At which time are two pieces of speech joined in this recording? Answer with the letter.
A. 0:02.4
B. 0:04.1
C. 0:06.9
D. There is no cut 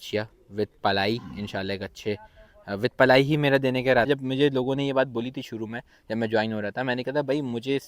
B